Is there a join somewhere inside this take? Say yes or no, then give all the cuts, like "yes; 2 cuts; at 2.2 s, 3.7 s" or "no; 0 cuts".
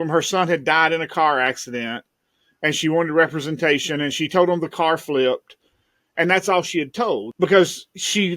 yes; 1 cut; at 7.3 s